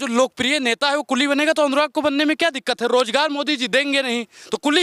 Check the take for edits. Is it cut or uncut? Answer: uncut